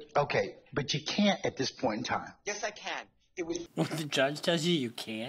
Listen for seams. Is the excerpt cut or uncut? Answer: cut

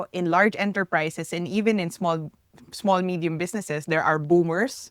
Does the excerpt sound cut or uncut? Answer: uncut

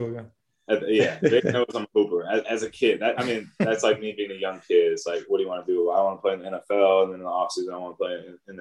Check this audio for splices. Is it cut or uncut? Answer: uncut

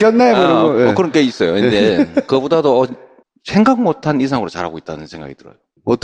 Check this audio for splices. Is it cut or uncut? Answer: uncut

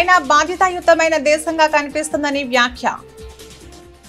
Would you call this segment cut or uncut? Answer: uncut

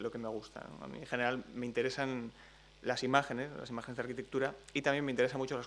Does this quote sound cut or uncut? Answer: cut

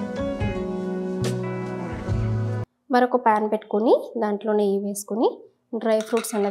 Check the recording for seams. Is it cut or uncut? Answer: cut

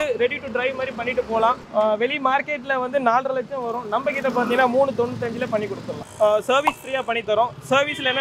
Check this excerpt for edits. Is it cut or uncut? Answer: cut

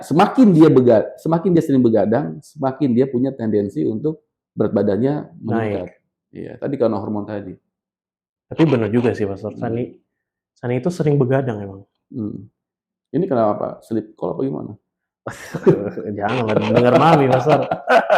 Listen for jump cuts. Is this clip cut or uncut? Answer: uncut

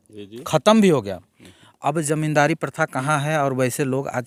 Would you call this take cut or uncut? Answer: uncut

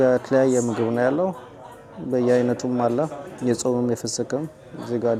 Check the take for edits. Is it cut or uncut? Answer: uncut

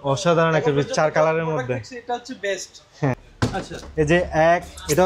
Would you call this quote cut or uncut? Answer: cut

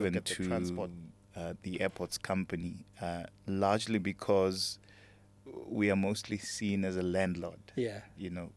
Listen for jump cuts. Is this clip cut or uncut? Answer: uncut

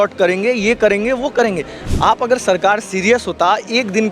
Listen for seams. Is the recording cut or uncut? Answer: cut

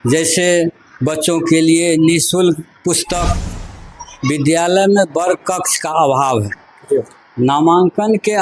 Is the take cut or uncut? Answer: cut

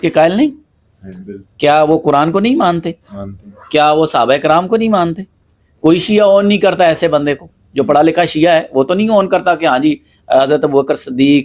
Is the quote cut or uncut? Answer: uncut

